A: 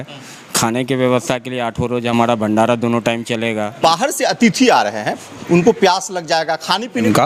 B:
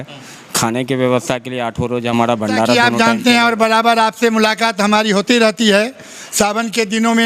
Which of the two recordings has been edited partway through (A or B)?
B